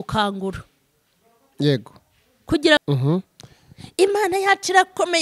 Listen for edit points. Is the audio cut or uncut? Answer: cut